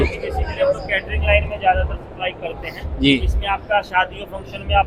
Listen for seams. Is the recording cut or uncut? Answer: uncut